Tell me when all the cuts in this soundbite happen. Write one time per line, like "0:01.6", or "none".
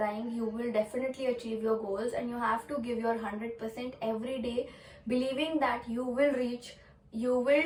none